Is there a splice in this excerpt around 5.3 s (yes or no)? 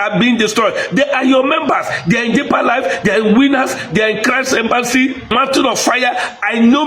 yes